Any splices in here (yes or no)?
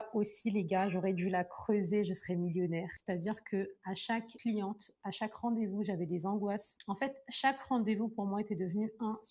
yes